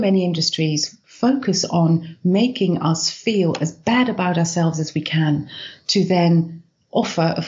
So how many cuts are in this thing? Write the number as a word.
one